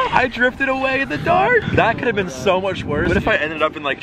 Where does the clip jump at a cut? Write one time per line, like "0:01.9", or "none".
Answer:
0:03.1